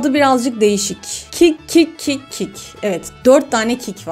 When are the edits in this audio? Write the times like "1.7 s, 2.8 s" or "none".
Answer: none